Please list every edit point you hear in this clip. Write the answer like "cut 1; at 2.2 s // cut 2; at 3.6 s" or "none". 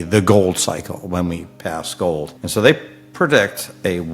cut 1; at 2.4 s